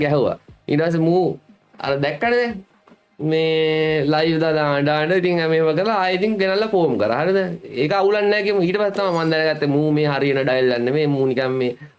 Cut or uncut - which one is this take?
uncut